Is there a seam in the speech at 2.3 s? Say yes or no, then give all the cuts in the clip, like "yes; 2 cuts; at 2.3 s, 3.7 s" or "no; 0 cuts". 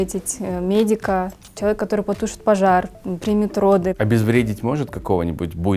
no; 1 cut; at 3.9 s